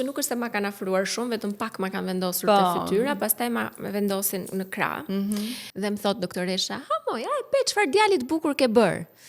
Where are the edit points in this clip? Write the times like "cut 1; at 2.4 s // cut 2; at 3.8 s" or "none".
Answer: cut 1; at 5.6 s